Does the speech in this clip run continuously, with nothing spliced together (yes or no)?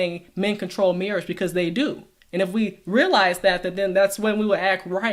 yes